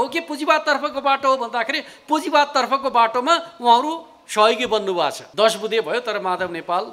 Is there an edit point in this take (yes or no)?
yes